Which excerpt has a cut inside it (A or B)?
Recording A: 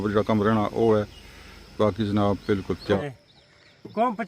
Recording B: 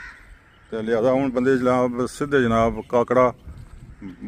A